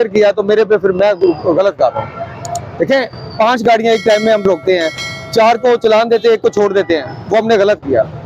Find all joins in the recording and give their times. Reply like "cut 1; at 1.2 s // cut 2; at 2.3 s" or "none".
none